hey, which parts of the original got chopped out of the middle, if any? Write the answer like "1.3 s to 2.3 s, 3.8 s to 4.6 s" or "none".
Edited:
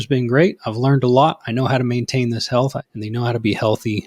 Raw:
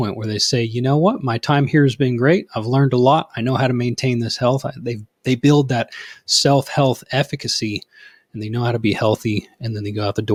4.7 s to 8.2 s